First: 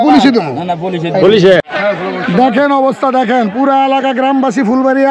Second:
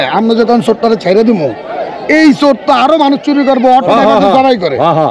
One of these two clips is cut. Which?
first; 1 cut; at 1.7 s

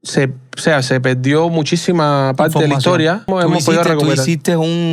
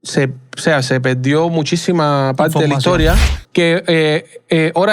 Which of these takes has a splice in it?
second; 1 cut; at 3.2 s

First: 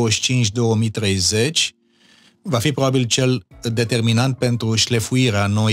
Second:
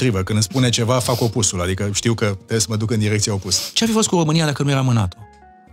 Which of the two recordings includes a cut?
second; 1 cut; at 3.6 s

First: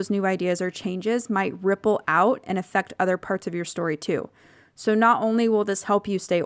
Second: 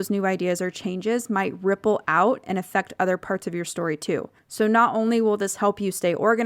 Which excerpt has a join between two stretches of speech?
second; 1 cut; at 4.4 s

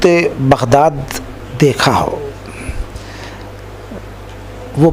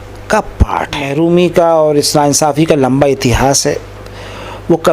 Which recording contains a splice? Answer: second; 1 cut; at 1.1 s

